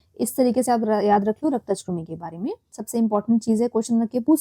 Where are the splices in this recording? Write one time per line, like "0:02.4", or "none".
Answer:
0:02.8